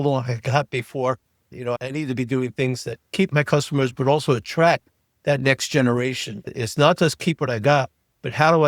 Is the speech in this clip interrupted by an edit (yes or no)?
yes